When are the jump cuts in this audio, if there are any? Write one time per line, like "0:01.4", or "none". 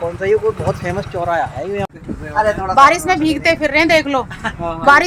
0:02.0